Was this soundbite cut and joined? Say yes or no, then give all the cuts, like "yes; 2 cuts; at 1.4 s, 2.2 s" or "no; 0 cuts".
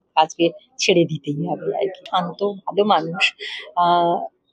yes; 1 cut; at 2.1 s